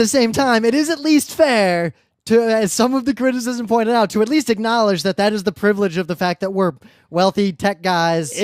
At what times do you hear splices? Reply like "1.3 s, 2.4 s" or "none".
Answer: 3.5 s